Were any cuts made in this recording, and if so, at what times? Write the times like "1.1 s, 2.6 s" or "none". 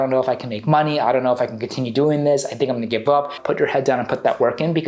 3.4 s

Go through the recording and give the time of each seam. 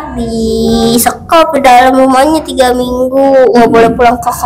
none

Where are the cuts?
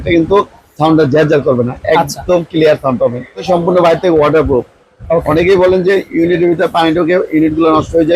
3.4 s

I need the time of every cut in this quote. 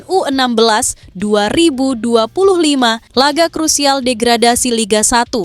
3.0 s

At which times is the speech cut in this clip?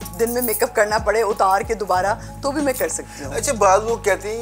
none

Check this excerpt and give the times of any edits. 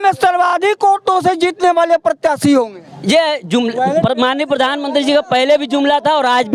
none

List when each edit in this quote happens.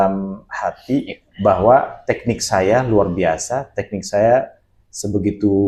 none

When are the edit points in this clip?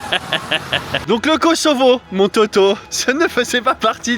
1.0 s, 2.9 s

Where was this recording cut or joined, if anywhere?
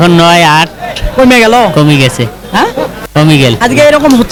none

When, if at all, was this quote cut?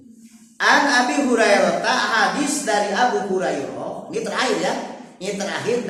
none

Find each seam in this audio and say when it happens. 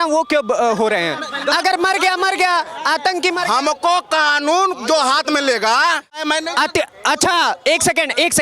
6.2 s

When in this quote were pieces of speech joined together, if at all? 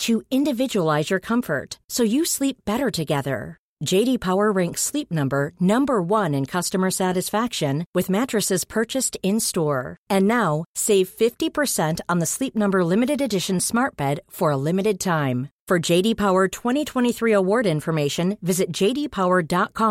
none

